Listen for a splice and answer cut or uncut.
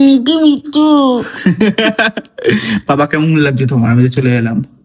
cut